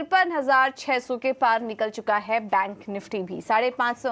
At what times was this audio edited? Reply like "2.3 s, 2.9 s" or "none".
2.0 s